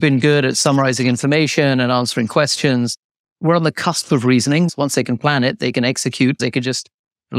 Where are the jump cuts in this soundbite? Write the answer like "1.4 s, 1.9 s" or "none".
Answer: 4.7 s, 6.4 s